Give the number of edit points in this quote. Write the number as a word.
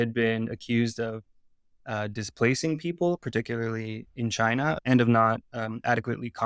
one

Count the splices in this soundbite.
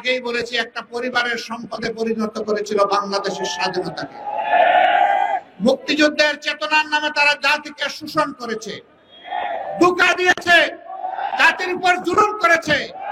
zero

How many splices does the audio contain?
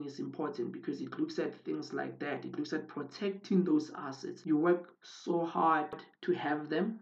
one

